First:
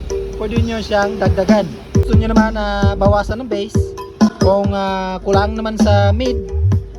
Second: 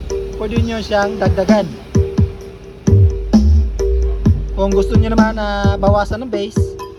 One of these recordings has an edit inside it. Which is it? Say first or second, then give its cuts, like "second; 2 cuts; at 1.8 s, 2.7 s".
first; 2 cuts; at 2.1 s, 4.3 s